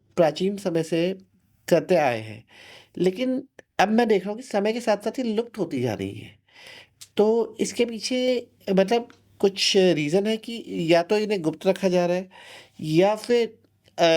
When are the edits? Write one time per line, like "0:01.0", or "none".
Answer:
none